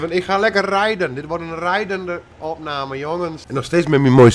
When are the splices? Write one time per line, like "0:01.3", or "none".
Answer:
0:03.4